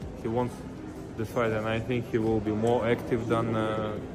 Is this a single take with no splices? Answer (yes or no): yes